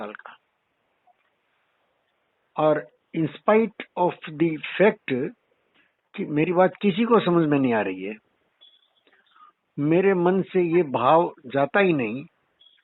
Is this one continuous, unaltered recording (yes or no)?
yes